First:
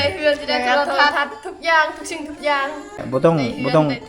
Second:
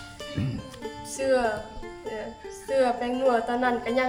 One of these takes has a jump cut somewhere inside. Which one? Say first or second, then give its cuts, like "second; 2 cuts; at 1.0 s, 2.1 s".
first; 1 cut; at 3.0 s